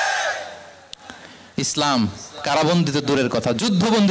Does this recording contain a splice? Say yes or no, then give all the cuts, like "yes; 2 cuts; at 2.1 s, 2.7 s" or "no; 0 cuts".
no; 0 cuts